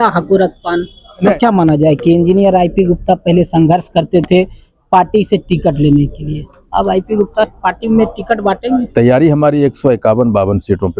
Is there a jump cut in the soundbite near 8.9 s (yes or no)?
yes